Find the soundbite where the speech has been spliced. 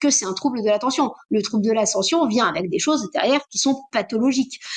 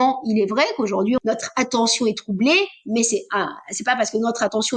second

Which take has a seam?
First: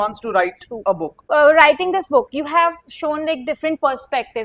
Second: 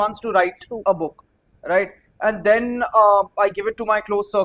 first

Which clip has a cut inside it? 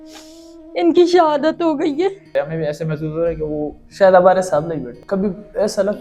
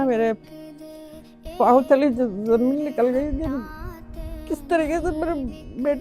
first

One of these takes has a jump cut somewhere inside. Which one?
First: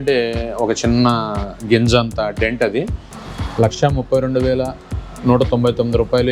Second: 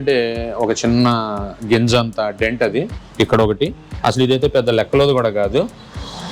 first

